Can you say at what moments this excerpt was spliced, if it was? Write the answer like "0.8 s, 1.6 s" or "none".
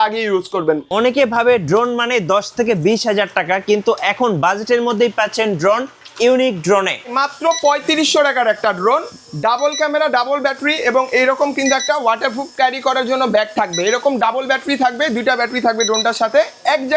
0.9 s, 7.1 s